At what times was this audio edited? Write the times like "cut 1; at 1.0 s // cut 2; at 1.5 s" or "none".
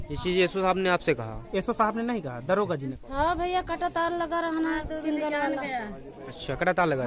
cut 1; at 3.0 s